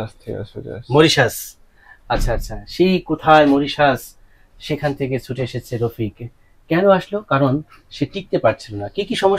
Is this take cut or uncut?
uncut